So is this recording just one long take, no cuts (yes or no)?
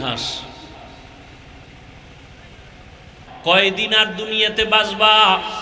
yes